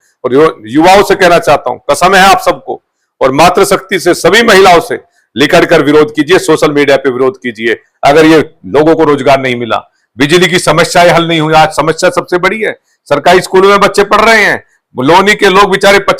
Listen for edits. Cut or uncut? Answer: cut